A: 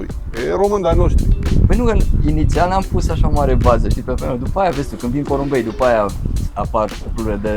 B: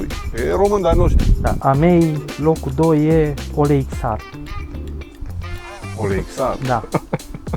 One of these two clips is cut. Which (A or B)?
B